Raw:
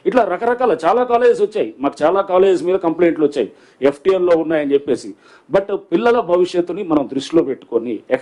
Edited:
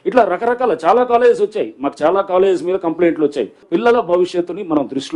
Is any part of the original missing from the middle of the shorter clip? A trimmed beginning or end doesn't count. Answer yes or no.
yes